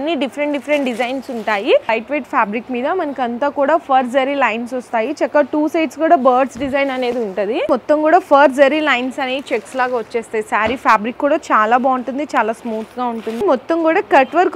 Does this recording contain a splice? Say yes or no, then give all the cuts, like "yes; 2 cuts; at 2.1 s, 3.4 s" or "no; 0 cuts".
yes; 3 cuts; at 1.9 s, 7.7 s, 13.4 s